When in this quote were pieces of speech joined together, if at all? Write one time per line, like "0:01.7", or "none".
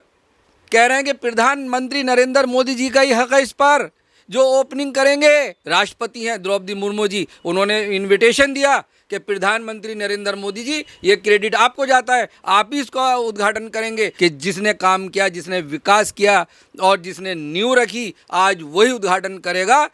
0:05.6
0:14.1